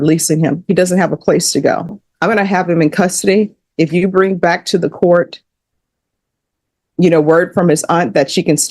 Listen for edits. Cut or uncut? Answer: cut